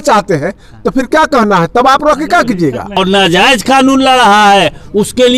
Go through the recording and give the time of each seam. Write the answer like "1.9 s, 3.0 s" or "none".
2.9 s